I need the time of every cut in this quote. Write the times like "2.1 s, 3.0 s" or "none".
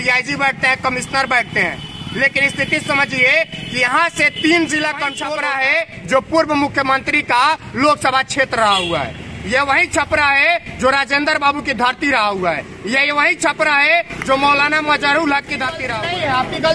5.2 s, 15.8 s